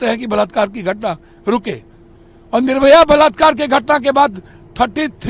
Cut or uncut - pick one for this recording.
uncut